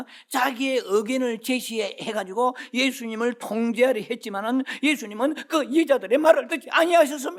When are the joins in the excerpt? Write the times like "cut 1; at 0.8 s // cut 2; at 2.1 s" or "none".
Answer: none